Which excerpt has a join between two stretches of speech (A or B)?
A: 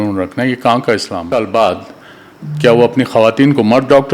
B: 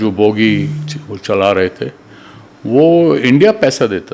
A